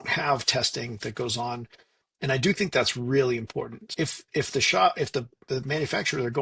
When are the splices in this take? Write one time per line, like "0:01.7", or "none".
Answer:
0:03.8

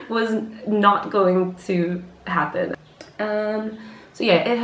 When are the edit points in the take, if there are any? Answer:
0:02.7

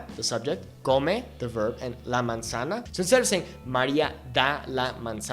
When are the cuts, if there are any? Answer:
0:02.9

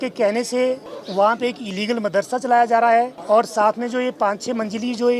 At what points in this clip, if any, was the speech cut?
0:00.9
0:03.2

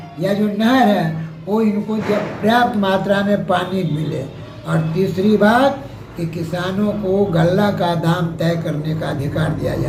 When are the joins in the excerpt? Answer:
none

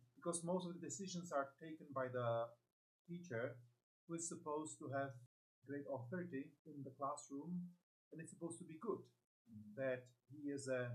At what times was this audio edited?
0:05.3
0:06.6

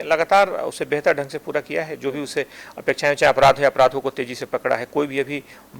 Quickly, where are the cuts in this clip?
none

